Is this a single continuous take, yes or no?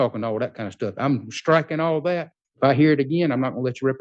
no